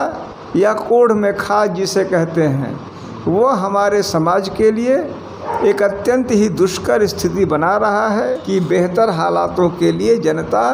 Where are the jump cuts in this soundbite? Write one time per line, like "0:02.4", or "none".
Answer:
0:08.4